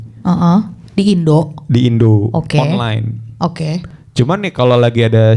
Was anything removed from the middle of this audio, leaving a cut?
yes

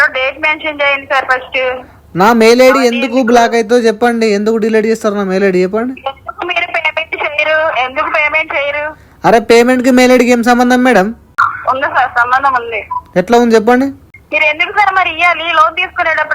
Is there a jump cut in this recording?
no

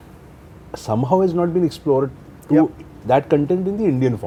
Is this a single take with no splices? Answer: yes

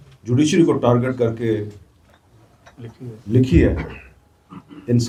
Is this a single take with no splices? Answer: yes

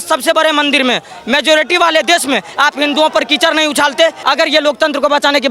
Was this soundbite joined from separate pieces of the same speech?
yes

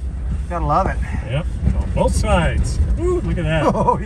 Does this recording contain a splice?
no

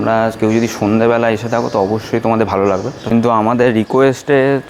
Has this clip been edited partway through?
yes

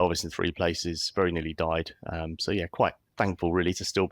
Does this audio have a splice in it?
yes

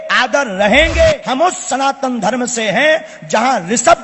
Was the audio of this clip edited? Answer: yes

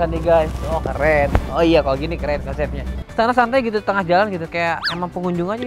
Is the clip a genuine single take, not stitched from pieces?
no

